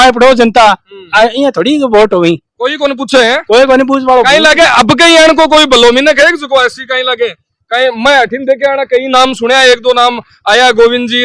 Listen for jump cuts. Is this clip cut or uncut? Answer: uncut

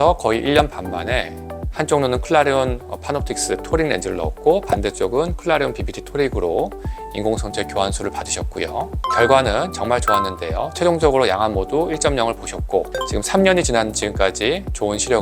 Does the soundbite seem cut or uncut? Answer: cut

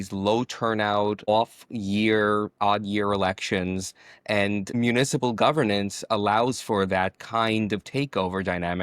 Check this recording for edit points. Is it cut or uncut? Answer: cut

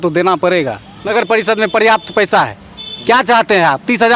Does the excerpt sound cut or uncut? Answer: cut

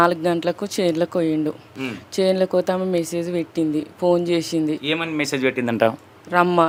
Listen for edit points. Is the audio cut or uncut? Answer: uncut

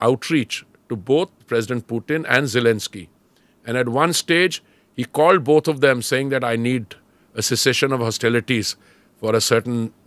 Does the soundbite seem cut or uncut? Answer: cut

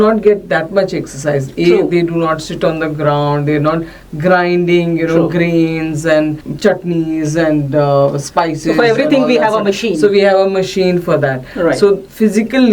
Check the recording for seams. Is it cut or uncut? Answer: cut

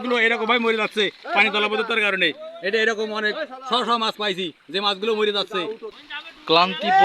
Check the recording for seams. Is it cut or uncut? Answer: cut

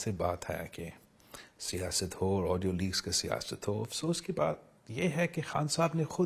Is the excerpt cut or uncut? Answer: uncut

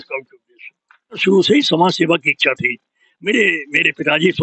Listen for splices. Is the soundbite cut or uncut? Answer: cut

